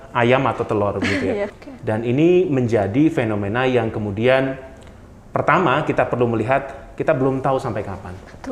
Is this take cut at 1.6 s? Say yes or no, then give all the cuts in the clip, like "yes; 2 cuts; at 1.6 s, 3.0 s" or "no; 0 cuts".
yes; 1 cut; at 1.6 s